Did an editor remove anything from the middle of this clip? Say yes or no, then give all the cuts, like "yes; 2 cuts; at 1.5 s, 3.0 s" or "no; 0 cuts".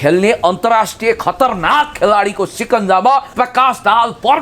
yes; 1 cut; at 3.3 s